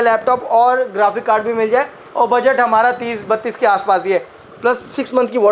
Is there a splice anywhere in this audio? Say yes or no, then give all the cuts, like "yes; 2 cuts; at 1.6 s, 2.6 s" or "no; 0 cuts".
yes; 1 cut; at 4.4 s